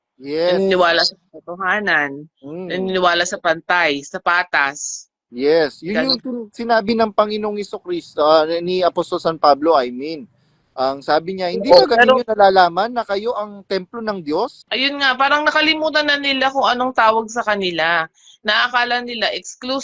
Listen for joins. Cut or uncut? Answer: cut